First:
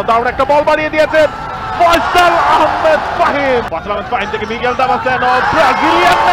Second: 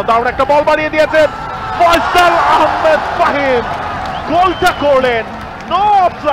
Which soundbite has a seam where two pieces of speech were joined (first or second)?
first